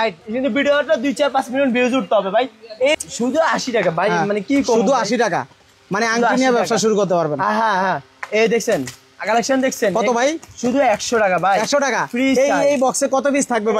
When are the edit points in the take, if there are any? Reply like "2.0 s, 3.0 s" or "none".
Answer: 3.0 s